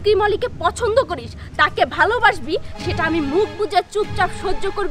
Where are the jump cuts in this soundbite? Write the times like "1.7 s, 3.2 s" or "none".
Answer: none